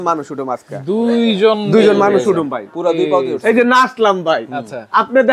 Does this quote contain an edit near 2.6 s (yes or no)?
no